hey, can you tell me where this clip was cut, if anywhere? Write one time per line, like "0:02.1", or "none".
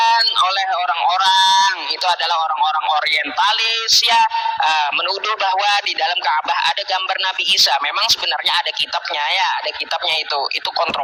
none